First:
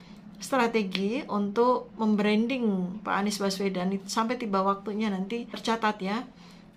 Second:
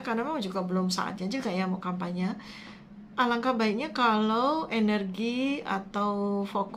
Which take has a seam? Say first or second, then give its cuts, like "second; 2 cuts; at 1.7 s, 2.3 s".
first; 1 cut; at 5.5 s